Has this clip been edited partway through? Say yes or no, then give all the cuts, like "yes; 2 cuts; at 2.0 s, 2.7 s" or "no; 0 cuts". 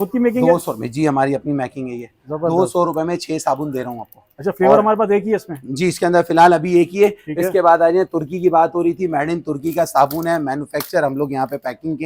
no; 0 cuts